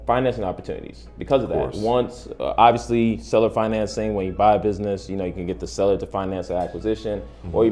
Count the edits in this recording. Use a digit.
0